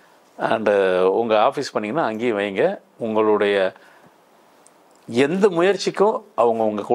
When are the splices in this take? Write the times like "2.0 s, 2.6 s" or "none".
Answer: none

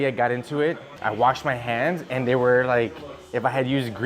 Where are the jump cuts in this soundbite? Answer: 0.9 s

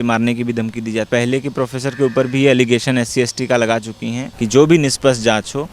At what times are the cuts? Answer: 1.1 s, 4.3 s

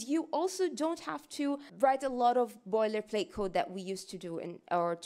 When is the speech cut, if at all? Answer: 1.7 s

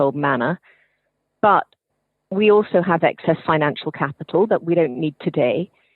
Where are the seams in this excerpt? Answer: none

